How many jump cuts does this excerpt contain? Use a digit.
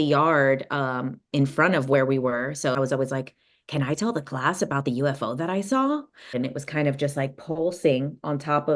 2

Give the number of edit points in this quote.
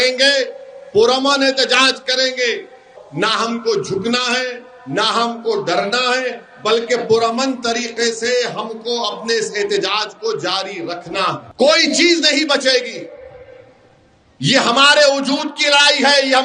2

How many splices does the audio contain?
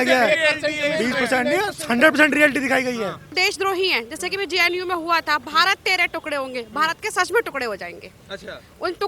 1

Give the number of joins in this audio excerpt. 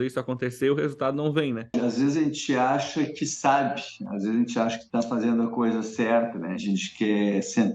3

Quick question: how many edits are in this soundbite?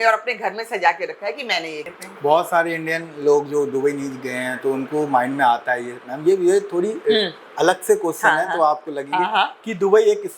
1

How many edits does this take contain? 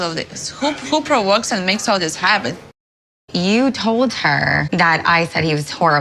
2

